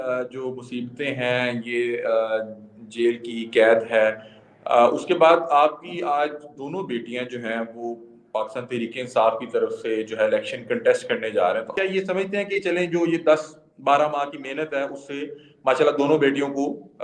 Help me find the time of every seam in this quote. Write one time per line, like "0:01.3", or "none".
0:11.7